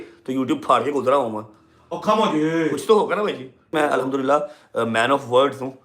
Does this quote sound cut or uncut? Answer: cut